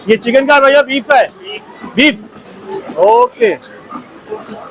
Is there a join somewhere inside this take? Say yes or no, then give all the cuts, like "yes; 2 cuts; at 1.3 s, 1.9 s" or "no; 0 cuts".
no; 0 cuts